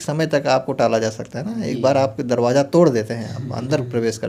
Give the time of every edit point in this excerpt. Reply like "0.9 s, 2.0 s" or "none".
none